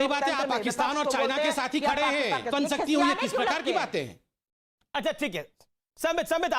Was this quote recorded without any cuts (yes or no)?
no